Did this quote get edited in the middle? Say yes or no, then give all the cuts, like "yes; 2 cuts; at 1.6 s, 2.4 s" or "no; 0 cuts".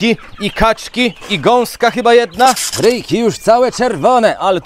yes; 1 cut; at 2.7 s